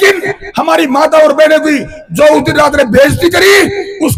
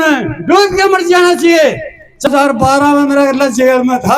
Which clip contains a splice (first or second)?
second